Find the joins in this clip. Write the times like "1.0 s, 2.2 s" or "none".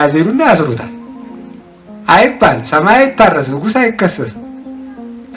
none